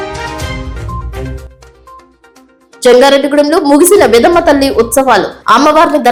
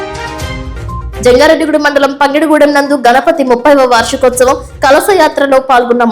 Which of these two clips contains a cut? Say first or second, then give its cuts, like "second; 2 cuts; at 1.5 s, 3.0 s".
second; 1 cut; at 1.1 s